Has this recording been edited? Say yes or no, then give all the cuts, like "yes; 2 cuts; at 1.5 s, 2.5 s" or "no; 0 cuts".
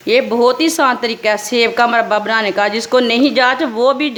no; 0 cuts